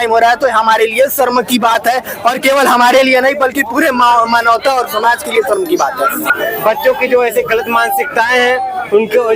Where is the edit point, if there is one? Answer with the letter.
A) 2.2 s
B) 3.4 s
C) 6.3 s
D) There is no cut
C